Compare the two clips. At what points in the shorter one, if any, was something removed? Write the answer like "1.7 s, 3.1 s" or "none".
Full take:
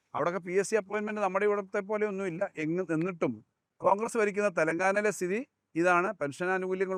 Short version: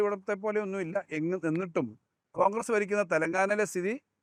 none

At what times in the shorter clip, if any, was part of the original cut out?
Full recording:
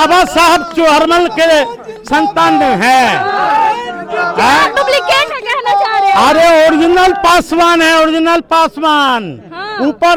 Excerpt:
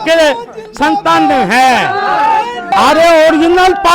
2.7 s

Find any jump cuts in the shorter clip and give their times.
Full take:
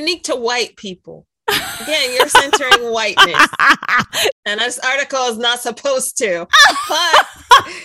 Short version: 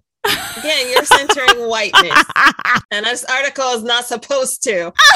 2.9 s

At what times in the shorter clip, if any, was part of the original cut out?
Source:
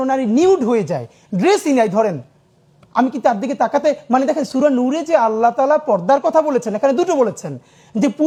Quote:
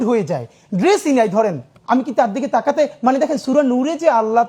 1.7 s

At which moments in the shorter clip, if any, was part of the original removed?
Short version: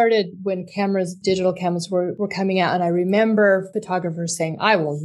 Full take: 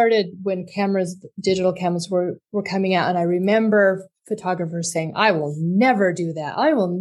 1.1 s, 2.1 s, 3.7 s

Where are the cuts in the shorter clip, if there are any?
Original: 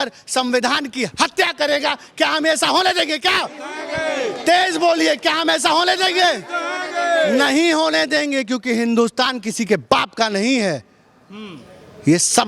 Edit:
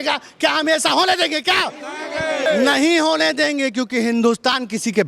2.5 s

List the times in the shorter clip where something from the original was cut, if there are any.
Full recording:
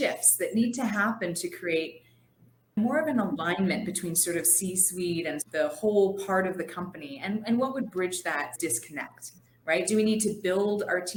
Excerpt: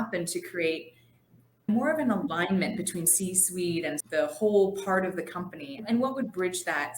3.1 s, 5.8 s

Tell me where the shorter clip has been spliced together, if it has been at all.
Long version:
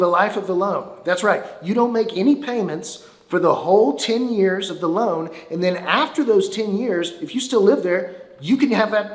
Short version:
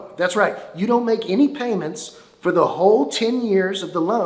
none

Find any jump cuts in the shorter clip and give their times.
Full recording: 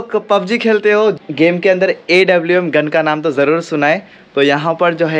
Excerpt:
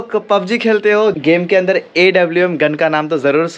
1.2 s

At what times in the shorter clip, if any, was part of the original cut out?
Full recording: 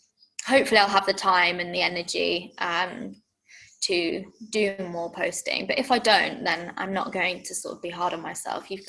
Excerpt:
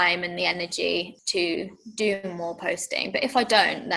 1.1 s

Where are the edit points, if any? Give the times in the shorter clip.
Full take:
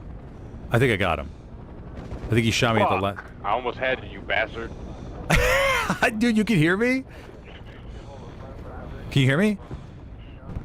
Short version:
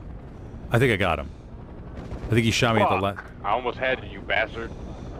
none

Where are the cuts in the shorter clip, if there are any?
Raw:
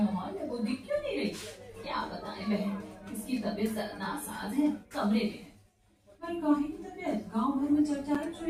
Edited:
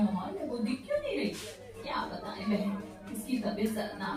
none

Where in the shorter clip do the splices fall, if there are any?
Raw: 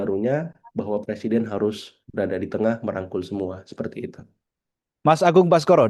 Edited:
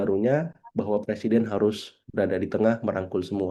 none

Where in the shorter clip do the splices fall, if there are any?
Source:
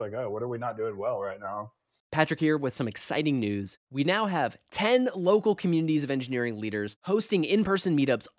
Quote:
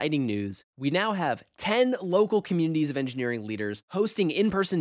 none

